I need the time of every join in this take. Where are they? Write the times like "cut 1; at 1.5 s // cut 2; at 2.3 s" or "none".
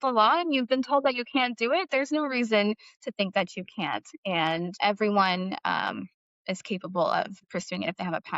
cut 1; at 7.5 s